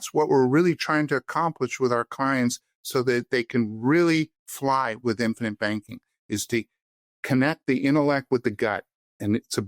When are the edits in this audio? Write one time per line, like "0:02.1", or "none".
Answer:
none